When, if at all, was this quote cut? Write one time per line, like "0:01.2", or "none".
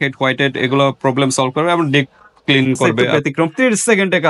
0:03.0